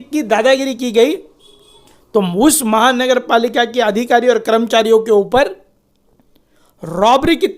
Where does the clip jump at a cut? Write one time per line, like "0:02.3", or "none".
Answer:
none

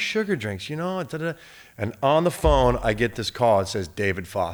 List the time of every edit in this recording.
none

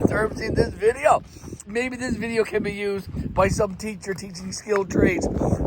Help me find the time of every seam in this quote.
0:01.6

